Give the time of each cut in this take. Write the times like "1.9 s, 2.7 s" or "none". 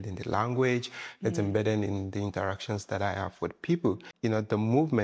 4.1 s